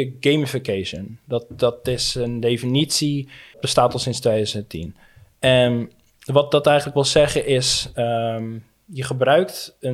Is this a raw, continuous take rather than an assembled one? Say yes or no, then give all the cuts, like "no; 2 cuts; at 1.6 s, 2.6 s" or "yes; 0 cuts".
no; 1 cut; at 3.6 s